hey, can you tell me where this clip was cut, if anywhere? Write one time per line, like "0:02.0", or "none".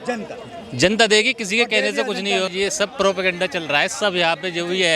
0:02.5